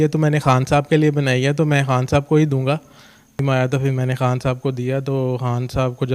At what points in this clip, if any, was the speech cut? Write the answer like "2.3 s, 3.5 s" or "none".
3.4 s

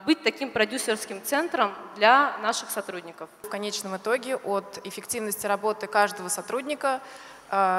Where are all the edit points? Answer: 3.5 s

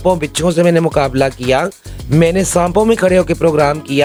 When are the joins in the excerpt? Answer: none

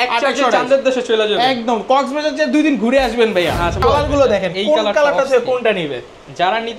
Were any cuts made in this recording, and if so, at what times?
3.8 s

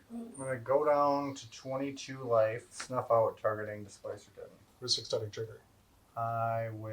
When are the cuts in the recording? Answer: 2.8 s

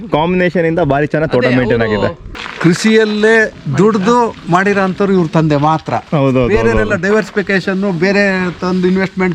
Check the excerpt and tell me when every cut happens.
2.3 s

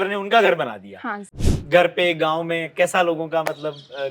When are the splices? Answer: 1.5 s

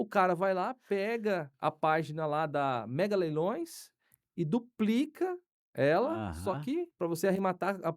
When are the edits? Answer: 1.5 s, 6.9 s

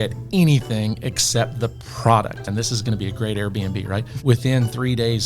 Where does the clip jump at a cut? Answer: 2.4 s, 4.1 s

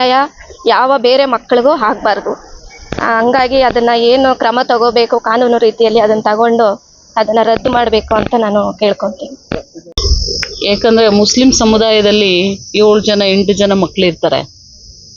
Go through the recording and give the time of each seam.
9.7 s

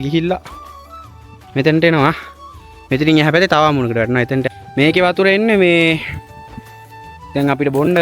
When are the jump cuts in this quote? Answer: 4.5 s

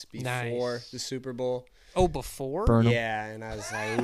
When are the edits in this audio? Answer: none

